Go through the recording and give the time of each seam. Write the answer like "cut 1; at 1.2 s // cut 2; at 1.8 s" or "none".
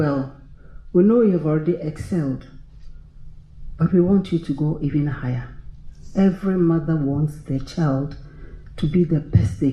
none